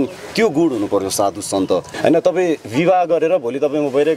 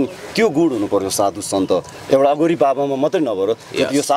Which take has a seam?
first; 1 cut; at 1.9 s

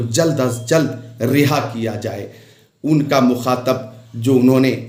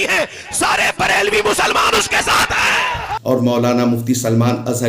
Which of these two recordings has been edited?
second; 1 cut; at 3.1 s

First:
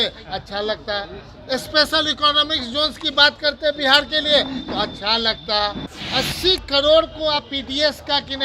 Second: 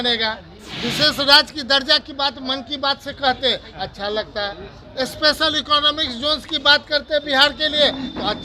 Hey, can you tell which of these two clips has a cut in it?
first; 1 cut; at 5.9 s

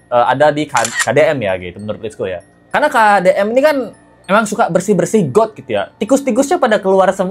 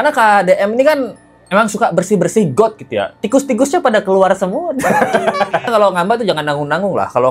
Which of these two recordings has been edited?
second; 1 cut; at 5.7 s

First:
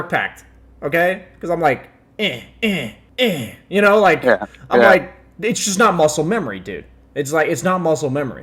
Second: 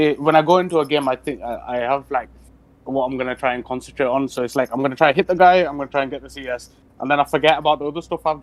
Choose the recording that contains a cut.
first; 1 cut; at 3.0 s

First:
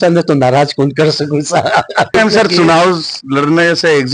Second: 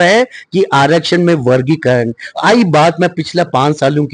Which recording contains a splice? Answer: first; 1 cut; at 2.1 s

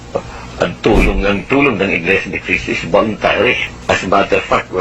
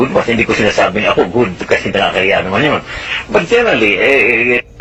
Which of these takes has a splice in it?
first; 1 cut; at 3.7 s

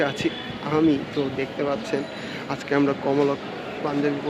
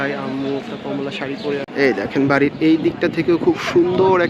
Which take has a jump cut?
second; 1 cut; at 1.7 s

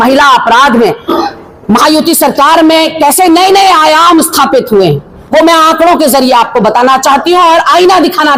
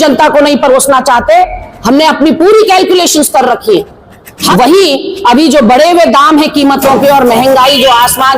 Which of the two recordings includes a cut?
second; 1 cut; at 4.5 s

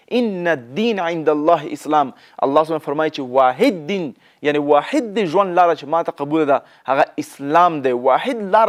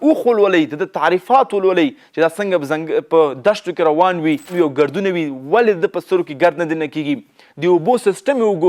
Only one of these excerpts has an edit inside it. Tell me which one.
second; 1 cut; at 4.5 s

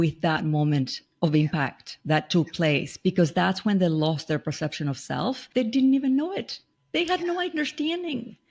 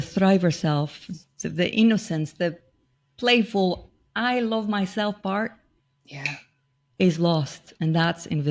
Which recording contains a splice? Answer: first; 1 cut; at 5.4 s

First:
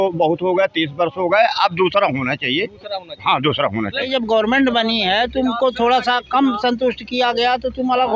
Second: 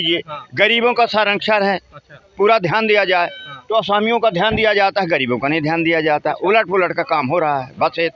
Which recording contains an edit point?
first; 1 cut; at 4.1 s

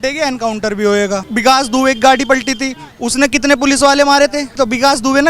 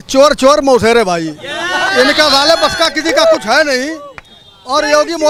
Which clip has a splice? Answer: first; 2 cuts; at 1.3 s, 4.5 s

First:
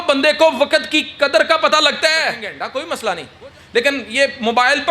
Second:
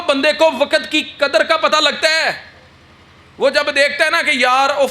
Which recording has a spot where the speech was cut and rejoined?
first; 1 cut; at 2.5 s

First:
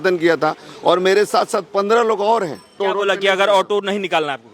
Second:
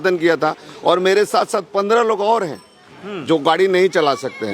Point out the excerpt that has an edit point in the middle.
first; 1 cut; at 2.8 s

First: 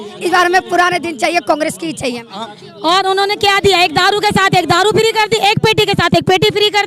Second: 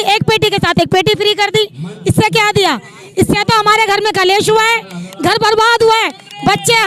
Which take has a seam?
first; 1 cut; at 2.3 s

